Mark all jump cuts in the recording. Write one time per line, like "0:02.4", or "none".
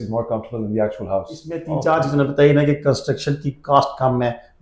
0:01.6